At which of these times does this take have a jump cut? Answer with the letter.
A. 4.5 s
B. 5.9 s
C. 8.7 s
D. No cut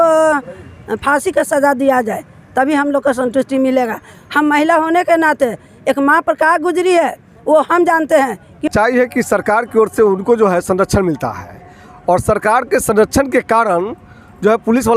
C